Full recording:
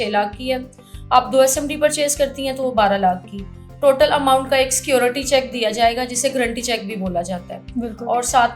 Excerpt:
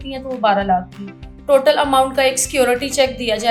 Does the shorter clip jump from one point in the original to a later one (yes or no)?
no